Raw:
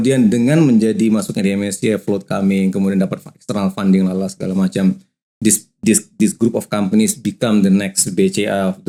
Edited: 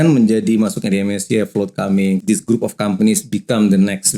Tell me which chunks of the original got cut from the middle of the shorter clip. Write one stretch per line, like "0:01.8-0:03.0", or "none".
0:02.7-0:06.1